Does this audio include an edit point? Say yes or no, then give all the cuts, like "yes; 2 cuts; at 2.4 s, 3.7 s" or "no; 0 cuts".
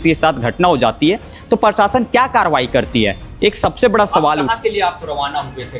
yes; 1 cut; at 4.5 s